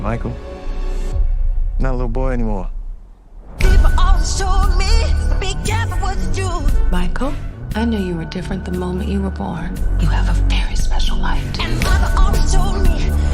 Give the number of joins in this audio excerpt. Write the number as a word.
one